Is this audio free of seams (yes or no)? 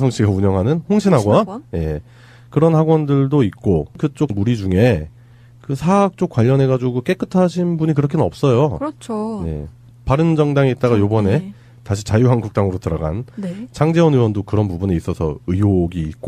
yes